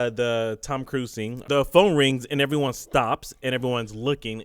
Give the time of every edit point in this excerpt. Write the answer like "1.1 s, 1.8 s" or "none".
1.3 s